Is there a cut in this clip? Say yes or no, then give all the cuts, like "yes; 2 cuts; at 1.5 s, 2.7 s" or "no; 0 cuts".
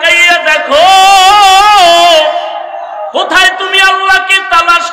no; 0 cuts